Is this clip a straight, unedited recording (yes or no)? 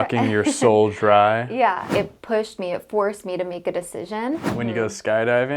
no